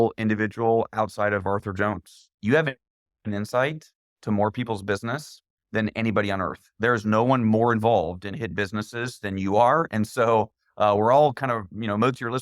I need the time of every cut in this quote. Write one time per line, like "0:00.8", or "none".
0:02.3